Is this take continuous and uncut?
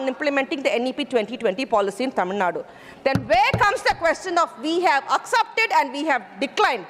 yes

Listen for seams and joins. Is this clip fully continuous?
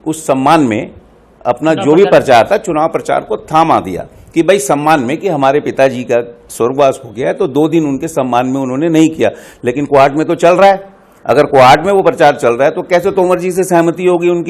yes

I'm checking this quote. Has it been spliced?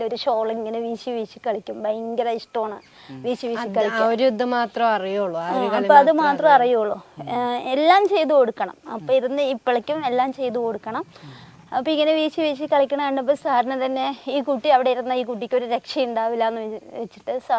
no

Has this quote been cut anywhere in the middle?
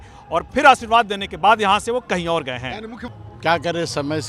yes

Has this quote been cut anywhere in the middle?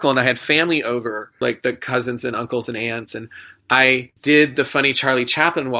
yes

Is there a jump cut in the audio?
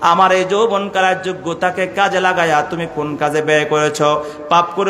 no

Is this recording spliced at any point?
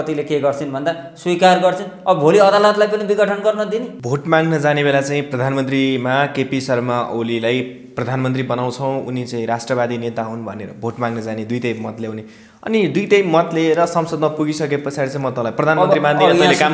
yes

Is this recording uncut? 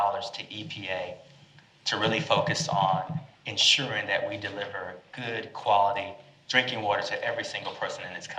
yes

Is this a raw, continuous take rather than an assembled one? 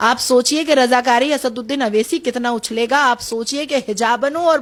yes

